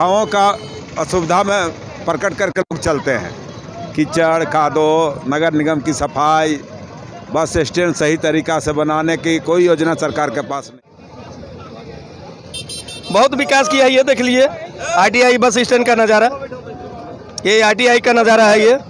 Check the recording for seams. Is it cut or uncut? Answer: cut